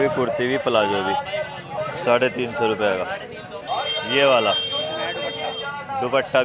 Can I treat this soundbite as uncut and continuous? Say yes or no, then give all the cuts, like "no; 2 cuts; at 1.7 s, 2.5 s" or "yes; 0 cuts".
yes; 0 cuts